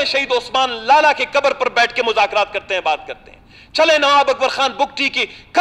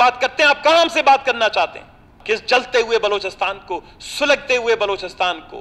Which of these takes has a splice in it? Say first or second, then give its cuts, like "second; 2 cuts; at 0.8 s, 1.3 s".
second; 1 cut; at 2.1 s